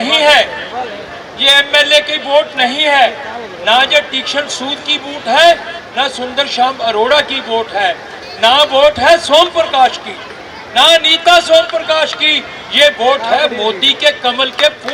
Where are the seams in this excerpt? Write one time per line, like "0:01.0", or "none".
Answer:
none